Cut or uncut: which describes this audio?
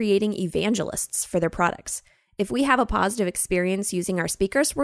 uncut